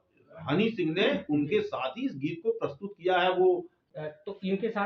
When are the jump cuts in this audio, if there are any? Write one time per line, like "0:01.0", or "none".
0:03.8